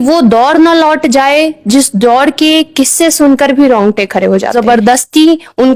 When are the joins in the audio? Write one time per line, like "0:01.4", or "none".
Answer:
0:04.6